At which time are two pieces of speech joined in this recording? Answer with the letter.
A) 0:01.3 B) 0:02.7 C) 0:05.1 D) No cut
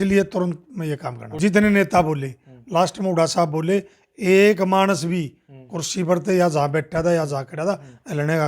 A